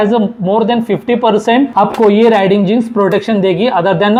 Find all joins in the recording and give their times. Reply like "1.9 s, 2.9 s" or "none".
none